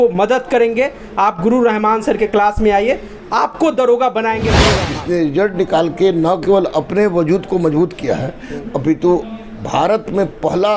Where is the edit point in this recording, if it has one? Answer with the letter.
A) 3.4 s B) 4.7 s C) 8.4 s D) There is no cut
B